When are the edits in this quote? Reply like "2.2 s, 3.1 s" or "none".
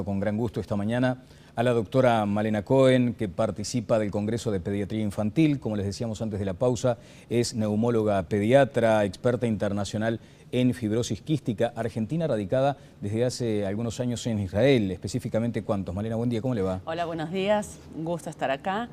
none